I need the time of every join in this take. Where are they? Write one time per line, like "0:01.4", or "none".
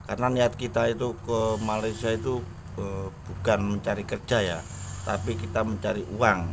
none